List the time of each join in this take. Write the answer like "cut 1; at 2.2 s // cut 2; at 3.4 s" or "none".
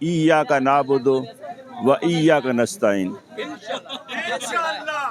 none

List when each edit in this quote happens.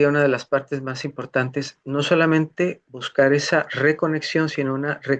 none

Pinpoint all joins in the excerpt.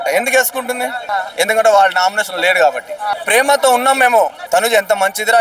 cut 1; at 1.0 s // cut 2; at 3.1 s // cut 3; at 4.4 s

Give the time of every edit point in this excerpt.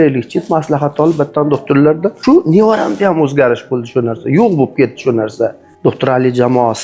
cut 1; at 2.1 s // cut 2; at 5.6 s

